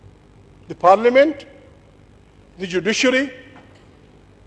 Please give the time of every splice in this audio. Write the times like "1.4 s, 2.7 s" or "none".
none